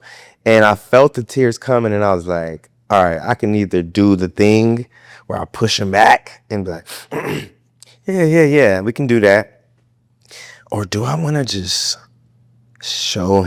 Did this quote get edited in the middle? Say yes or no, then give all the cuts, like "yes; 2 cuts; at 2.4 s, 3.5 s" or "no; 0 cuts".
no; 0 cuts